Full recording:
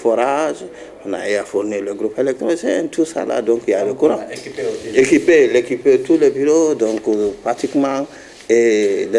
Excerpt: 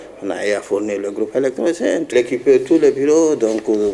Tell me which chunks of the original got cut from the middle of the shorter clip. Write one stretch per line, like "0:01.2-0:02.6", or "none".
0:02.9-0:05.5